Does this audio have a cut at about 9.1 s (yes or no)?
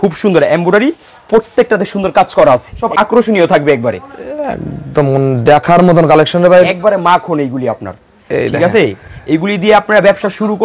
no